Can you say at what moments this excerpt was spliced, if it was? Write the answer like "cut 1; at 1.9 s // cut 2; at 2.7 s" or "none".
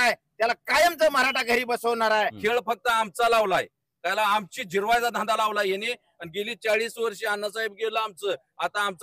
cut 1; at 2.3 s